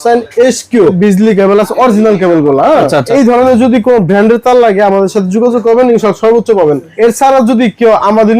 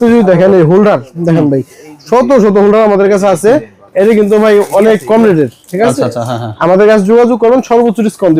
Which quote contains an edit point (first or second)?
first